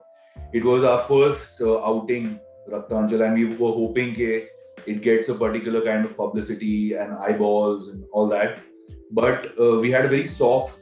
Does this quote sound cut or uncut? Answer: uncut